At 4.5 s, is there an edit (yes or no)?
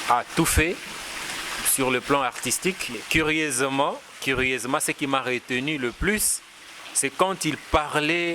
no